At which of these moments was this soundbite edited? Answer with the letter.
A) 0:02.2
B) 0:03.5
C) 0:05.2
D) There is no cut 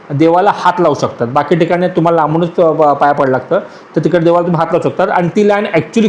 D